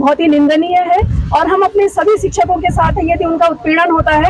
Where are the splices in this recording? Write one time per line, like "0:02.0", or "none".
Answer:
none